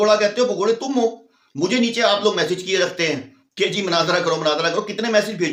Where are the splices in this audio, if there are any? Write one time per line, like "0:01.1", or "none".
none